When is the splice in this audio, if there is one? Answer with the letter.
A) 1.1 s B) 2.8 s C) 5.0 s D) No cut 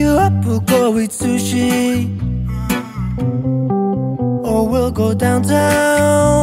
D